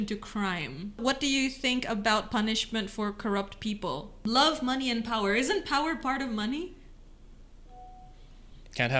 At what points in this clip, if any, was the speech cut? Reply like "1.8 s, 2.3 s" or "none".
1.0 s, 4.1 s